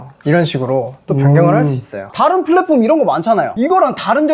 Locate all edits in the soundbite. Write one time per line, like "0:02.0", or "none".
0:02.1